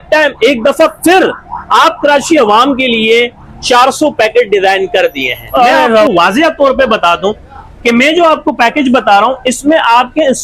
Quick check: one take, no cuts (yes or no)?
no